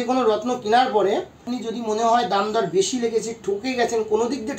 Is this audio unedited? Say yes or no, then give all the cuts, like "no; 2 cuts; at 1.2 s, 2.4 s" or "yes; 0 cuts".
no; 1 cut; at 1.6 s